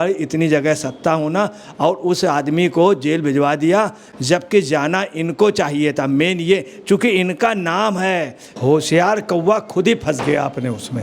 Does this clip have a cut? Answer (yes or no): yes